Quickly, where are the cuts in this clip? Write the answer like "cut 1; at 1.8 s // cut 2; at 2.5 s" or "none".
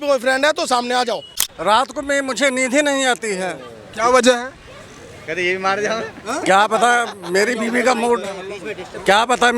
cut 1; at 1.4 s